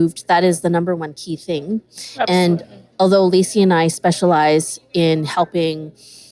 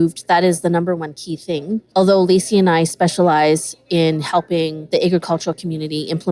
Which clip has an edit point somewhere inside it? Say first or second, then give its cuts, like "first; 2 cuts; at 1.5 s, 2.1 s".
second; 2 cuts; at 1.8 s, 4.8 s